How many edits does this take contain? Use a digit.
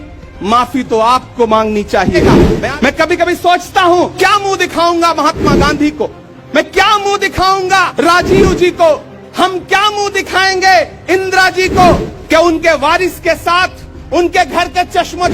4